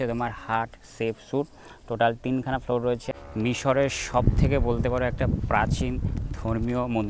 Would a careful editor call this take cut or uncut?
cut